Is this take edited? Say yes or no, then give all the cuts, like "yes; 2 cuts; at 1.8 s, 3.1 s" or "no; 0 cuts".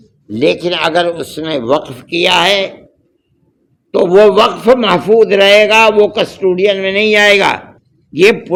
no; 0 cuts